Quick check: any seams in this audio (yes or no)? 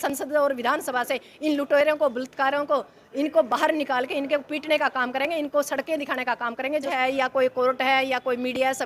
yes